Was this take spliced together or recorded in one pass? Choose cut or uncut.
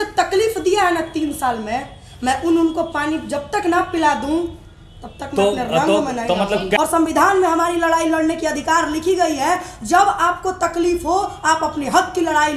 cut